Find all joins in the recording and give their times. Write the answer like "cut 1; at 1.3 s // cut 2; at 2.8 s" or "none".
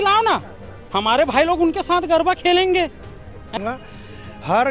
cut 1; at 3.6 s